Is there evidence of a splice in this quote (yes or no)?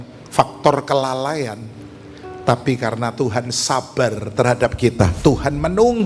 yes